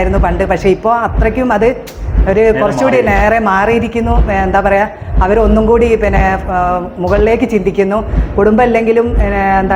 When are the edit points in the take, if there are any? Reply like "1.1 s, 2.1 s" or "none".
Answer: none